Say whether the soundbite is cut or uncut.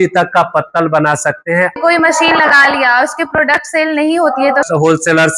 cut